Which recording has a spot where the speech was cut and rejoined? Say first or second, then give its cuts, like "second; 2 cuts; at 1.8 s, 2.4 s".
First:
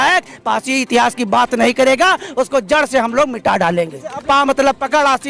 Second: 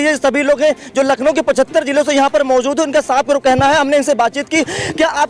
first; 1 cut; at 4.2 s